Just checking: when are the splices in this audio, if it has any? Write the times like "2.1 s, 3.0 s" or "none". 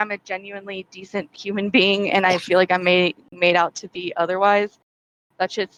none